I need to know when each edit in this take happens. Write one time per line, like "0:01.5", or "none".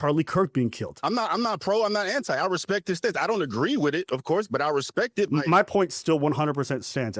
0:00.9
0:05.3

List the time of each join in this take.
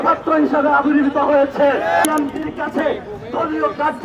0:02.0

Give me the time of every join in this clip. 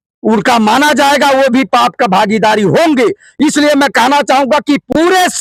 none

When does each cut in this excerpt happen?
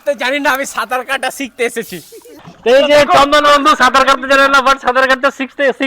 0:02.4

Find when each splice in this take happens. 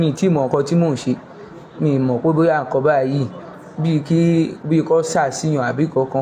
none

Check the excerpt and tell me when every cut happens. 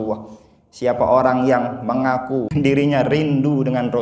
0:02.5

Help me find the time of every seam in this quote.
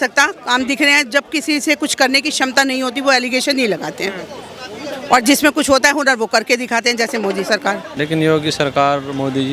0:07.9

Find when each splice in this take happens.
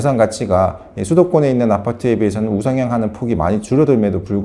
none

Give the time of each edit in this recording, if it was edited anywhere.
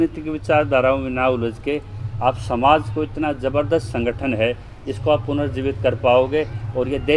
none

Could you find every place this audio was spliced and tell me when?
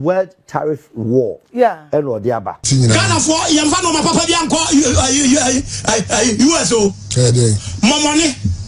0:02.7

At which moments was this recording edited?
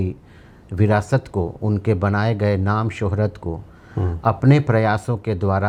none

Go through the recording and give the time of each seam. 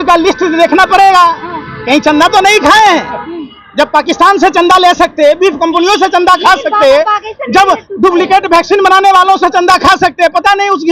none

